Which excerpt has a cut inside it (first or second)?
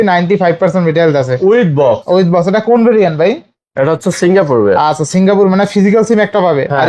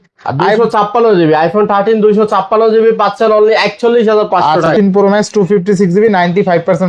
second